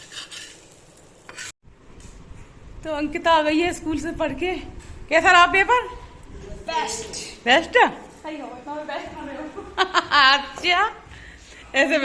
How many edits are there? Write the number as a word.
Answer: one